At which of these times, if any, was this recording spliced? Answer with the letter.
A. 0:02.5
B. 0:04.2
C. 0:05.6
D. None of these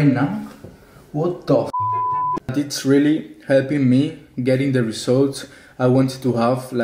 A